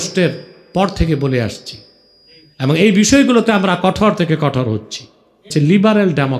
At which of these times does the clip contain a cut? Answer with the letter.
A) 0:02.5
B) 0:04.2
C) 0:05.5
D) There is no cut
C